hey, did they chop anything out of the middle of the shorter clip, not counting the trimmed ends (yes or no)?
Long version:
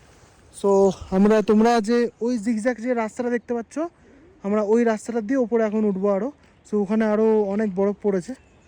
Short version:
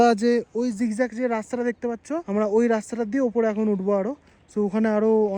yes